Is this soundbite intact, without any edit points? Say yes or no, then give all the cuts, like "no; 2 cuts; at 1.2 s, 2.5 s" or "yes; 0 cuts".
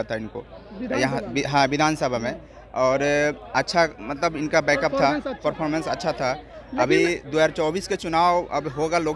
yes; 0 cuts